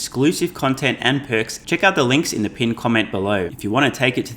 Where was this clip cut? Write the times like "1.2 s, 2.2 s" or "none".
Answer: 1.6 s, 3.5 s